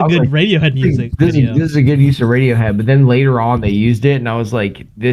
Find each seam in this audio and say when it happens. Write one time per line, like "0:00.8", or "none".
none